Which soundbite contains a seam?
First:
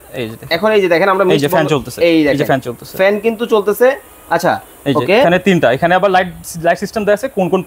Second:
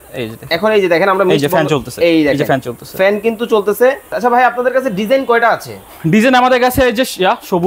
second; 1 cut; at 4.1 s

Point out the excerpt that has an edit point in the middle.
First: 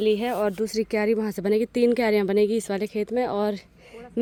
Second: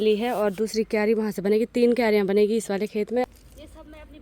second; 1 cut; at 3.3 s

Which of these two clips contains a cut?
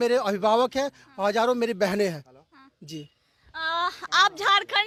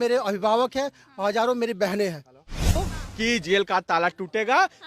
second; 1 cut; at 2.8 s

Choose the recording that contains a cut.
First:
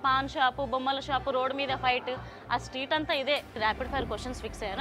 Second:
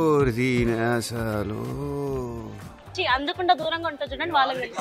first; 1 cut; at 3.6 s

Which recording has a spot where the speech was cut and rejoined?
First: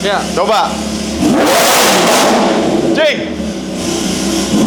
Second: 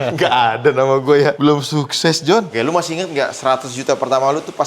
second; 1 cut; at 2.5 s

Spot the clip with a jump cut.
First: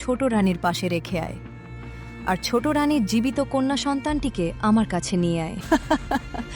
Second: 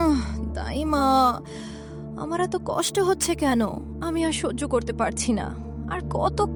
first; 1 cut; at 5.6 s

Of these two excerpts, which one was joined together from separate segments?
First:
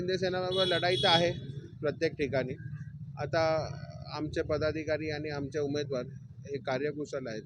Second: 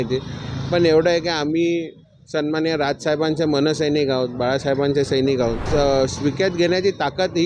second; 1 cut; at 5.6 s

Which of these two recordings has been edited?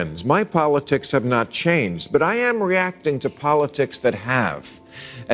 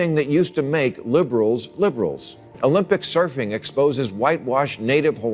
second; 1 cut; at 2.4 s

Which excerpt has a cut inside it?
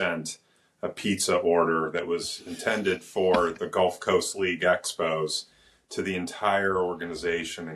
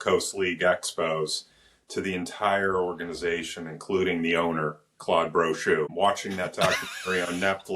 second; 1 cut; at 5.9 s

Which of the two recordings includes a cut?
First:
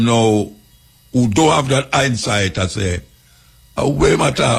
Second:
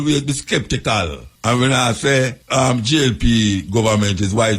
second; 2 cuts; at 1.2 s, 2.4 s

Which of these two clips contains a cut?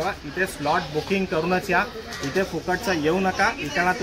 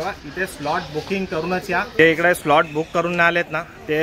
second; 1 cut; at 1.9 s

